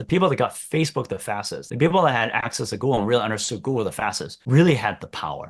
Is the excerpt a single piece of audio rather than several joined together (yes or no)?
yes